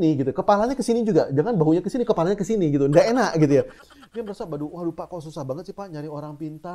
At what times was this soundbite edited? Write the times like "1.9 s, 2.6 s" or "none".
3.8 s